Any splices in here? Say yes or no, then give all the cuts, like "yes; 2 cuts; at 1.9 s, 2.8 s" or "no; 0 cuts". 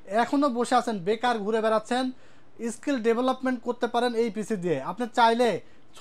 no; 0 cuts